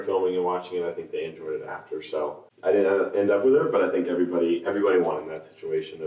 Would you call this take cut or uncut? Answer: uncut